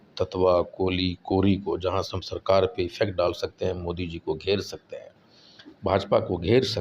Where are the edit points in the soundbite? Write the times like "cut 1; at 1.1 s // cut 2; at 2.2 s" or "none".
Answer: none